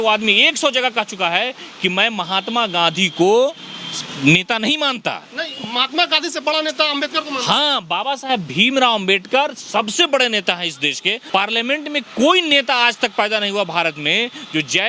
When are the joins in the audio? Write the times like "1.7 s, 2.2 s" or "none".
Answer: 11.3 s